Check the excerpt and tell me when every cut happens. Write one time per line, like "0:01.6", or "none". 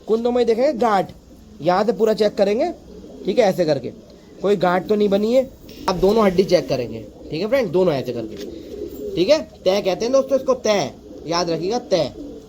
0:05.9